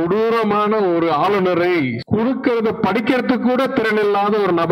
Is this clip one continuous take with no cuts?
yes; 0 cuts

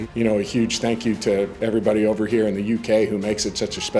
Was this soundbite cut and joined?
no; 0 cuts

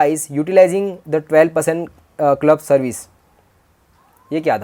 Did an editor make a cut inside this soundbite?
no; 0 cuts

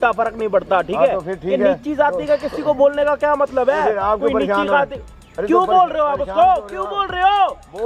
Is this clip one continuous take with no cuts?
yes; 0 cuts

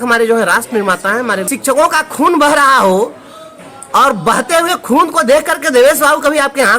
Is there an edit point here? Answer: yes; 1 cut; at 1.5 s

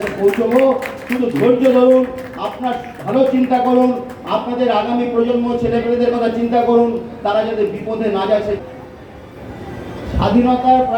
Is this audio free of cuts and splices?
no; 1 cut; at 8.6 s

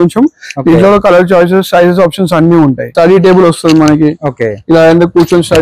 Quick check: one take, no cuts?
no; 1 cut; at 2.9 s

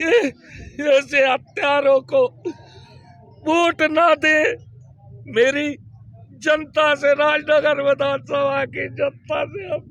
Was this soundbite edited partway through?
no; 0 cuts

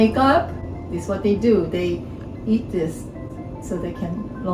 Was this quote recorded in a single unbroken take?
yes; 0 cuts

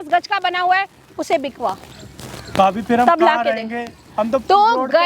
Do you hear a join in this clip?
no; 0 cuts

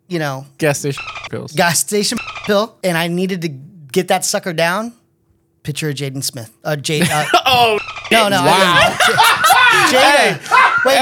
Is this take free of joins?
yes; 0 cuts

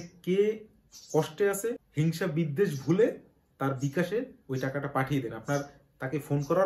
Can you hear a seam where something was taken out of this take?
yes; 1 cut; at 1.8 s

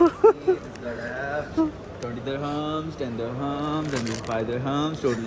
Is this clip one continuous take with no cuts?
yes; 0 cuts

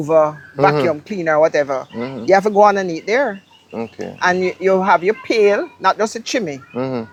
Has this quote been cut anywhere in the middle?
no; 0 cuts

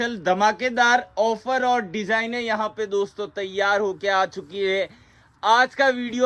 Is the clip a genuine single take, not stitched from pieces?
yes; 0 cuts

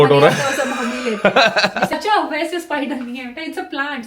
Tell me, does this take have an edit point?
yes; 1 cut; at 1.9 s

